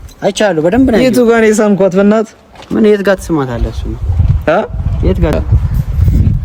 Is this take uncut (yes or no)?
yes